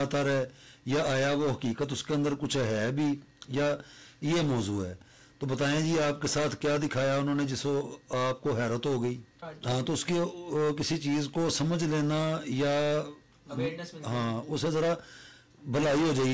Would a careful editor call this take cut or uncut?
cut